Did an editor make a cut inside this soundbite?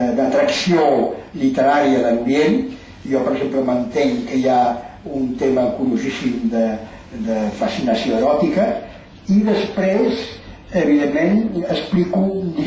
no; 0 cuts

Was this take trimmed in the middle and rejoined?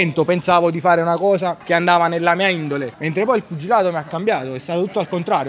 yes; 2 cuts; at 1.6 s, 3.0 s

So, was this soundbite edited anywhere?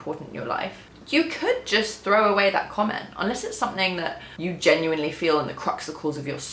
yes; 2 cuts; at 0.9 s, 4.3 s

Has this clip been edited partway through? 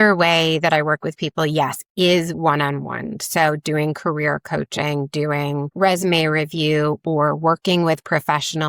no; 0 cuts

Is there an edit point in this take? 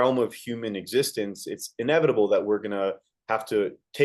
no; 0 cuts

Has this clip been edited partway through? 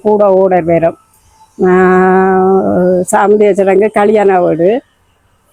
no; 0 cuts

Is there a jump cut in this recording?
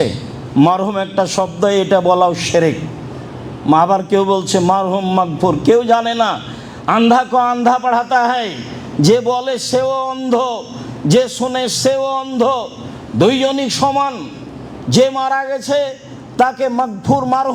no; 0 cuts

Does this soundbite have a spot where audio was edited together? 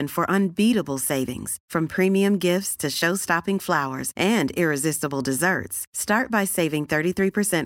no; 0 cuts

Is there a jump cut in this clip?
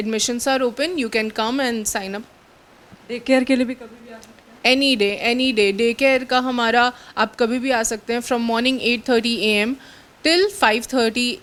no; 0 cuts

